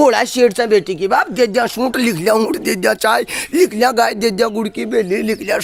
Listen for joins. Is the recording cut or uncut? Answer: uncut